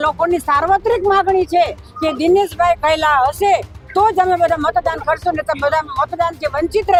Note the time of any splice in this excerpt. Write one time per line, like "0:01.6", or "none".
none